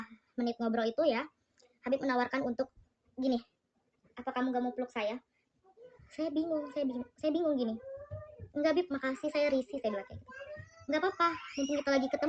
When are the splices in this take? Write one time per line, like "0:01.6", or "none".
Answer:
none